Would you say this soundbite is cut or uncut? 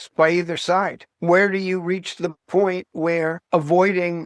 uncut